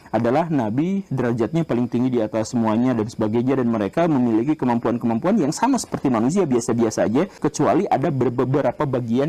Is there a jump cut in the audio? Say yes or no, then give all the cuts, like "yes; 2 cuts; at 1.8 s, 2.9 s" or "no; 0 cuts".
yes; 1 cut; at 7.3 s